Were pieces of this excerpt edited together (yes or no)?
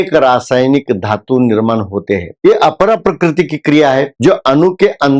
no